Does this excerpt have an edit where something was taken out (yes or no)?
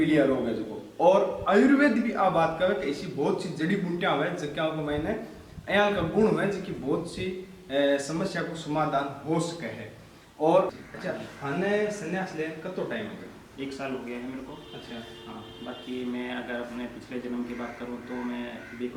yes